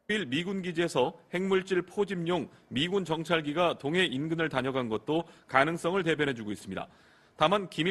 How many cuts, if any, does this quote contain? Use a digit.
0